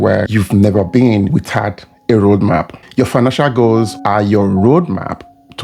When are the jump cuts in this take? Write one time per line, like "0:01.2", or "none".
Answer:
none